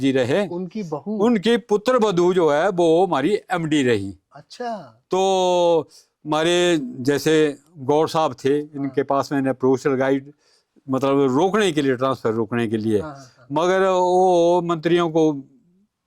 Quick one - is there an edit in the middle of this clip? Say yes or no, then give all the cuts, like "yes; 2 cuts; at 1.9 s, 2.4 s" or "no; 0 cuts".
no; 0 cuts